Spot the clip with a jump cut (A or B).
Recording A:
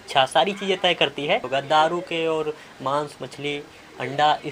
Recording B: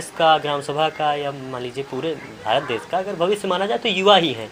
A